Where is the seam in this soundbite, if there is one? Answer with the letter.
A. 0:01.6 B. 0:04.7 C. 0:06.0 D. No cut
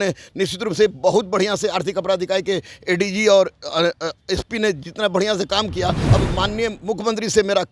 C